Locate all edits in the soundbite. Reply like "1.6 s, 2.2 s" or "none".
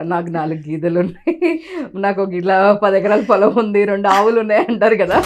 none